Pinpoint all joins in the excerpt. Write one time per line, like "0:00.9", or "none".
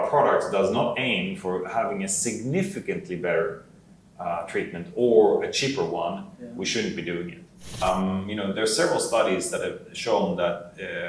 0:07.8